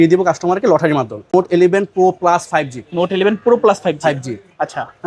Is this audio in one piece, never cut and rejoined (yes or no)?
no